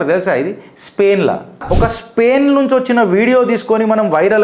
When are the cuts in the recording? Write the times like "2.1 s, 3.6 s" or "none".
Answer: 1.6 s